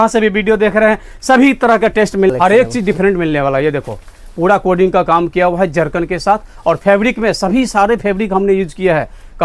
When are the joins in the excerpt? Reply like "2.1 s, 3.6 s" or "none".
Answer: 2.3 s